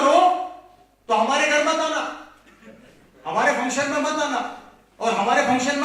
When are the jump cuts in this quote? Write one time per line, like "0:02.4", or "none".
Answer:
none